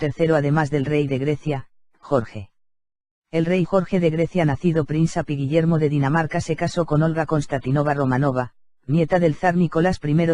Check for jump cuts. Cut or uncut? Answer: cut